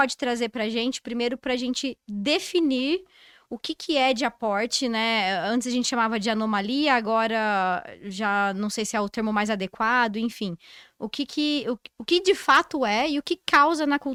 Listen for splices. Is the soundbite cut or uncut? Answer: uncut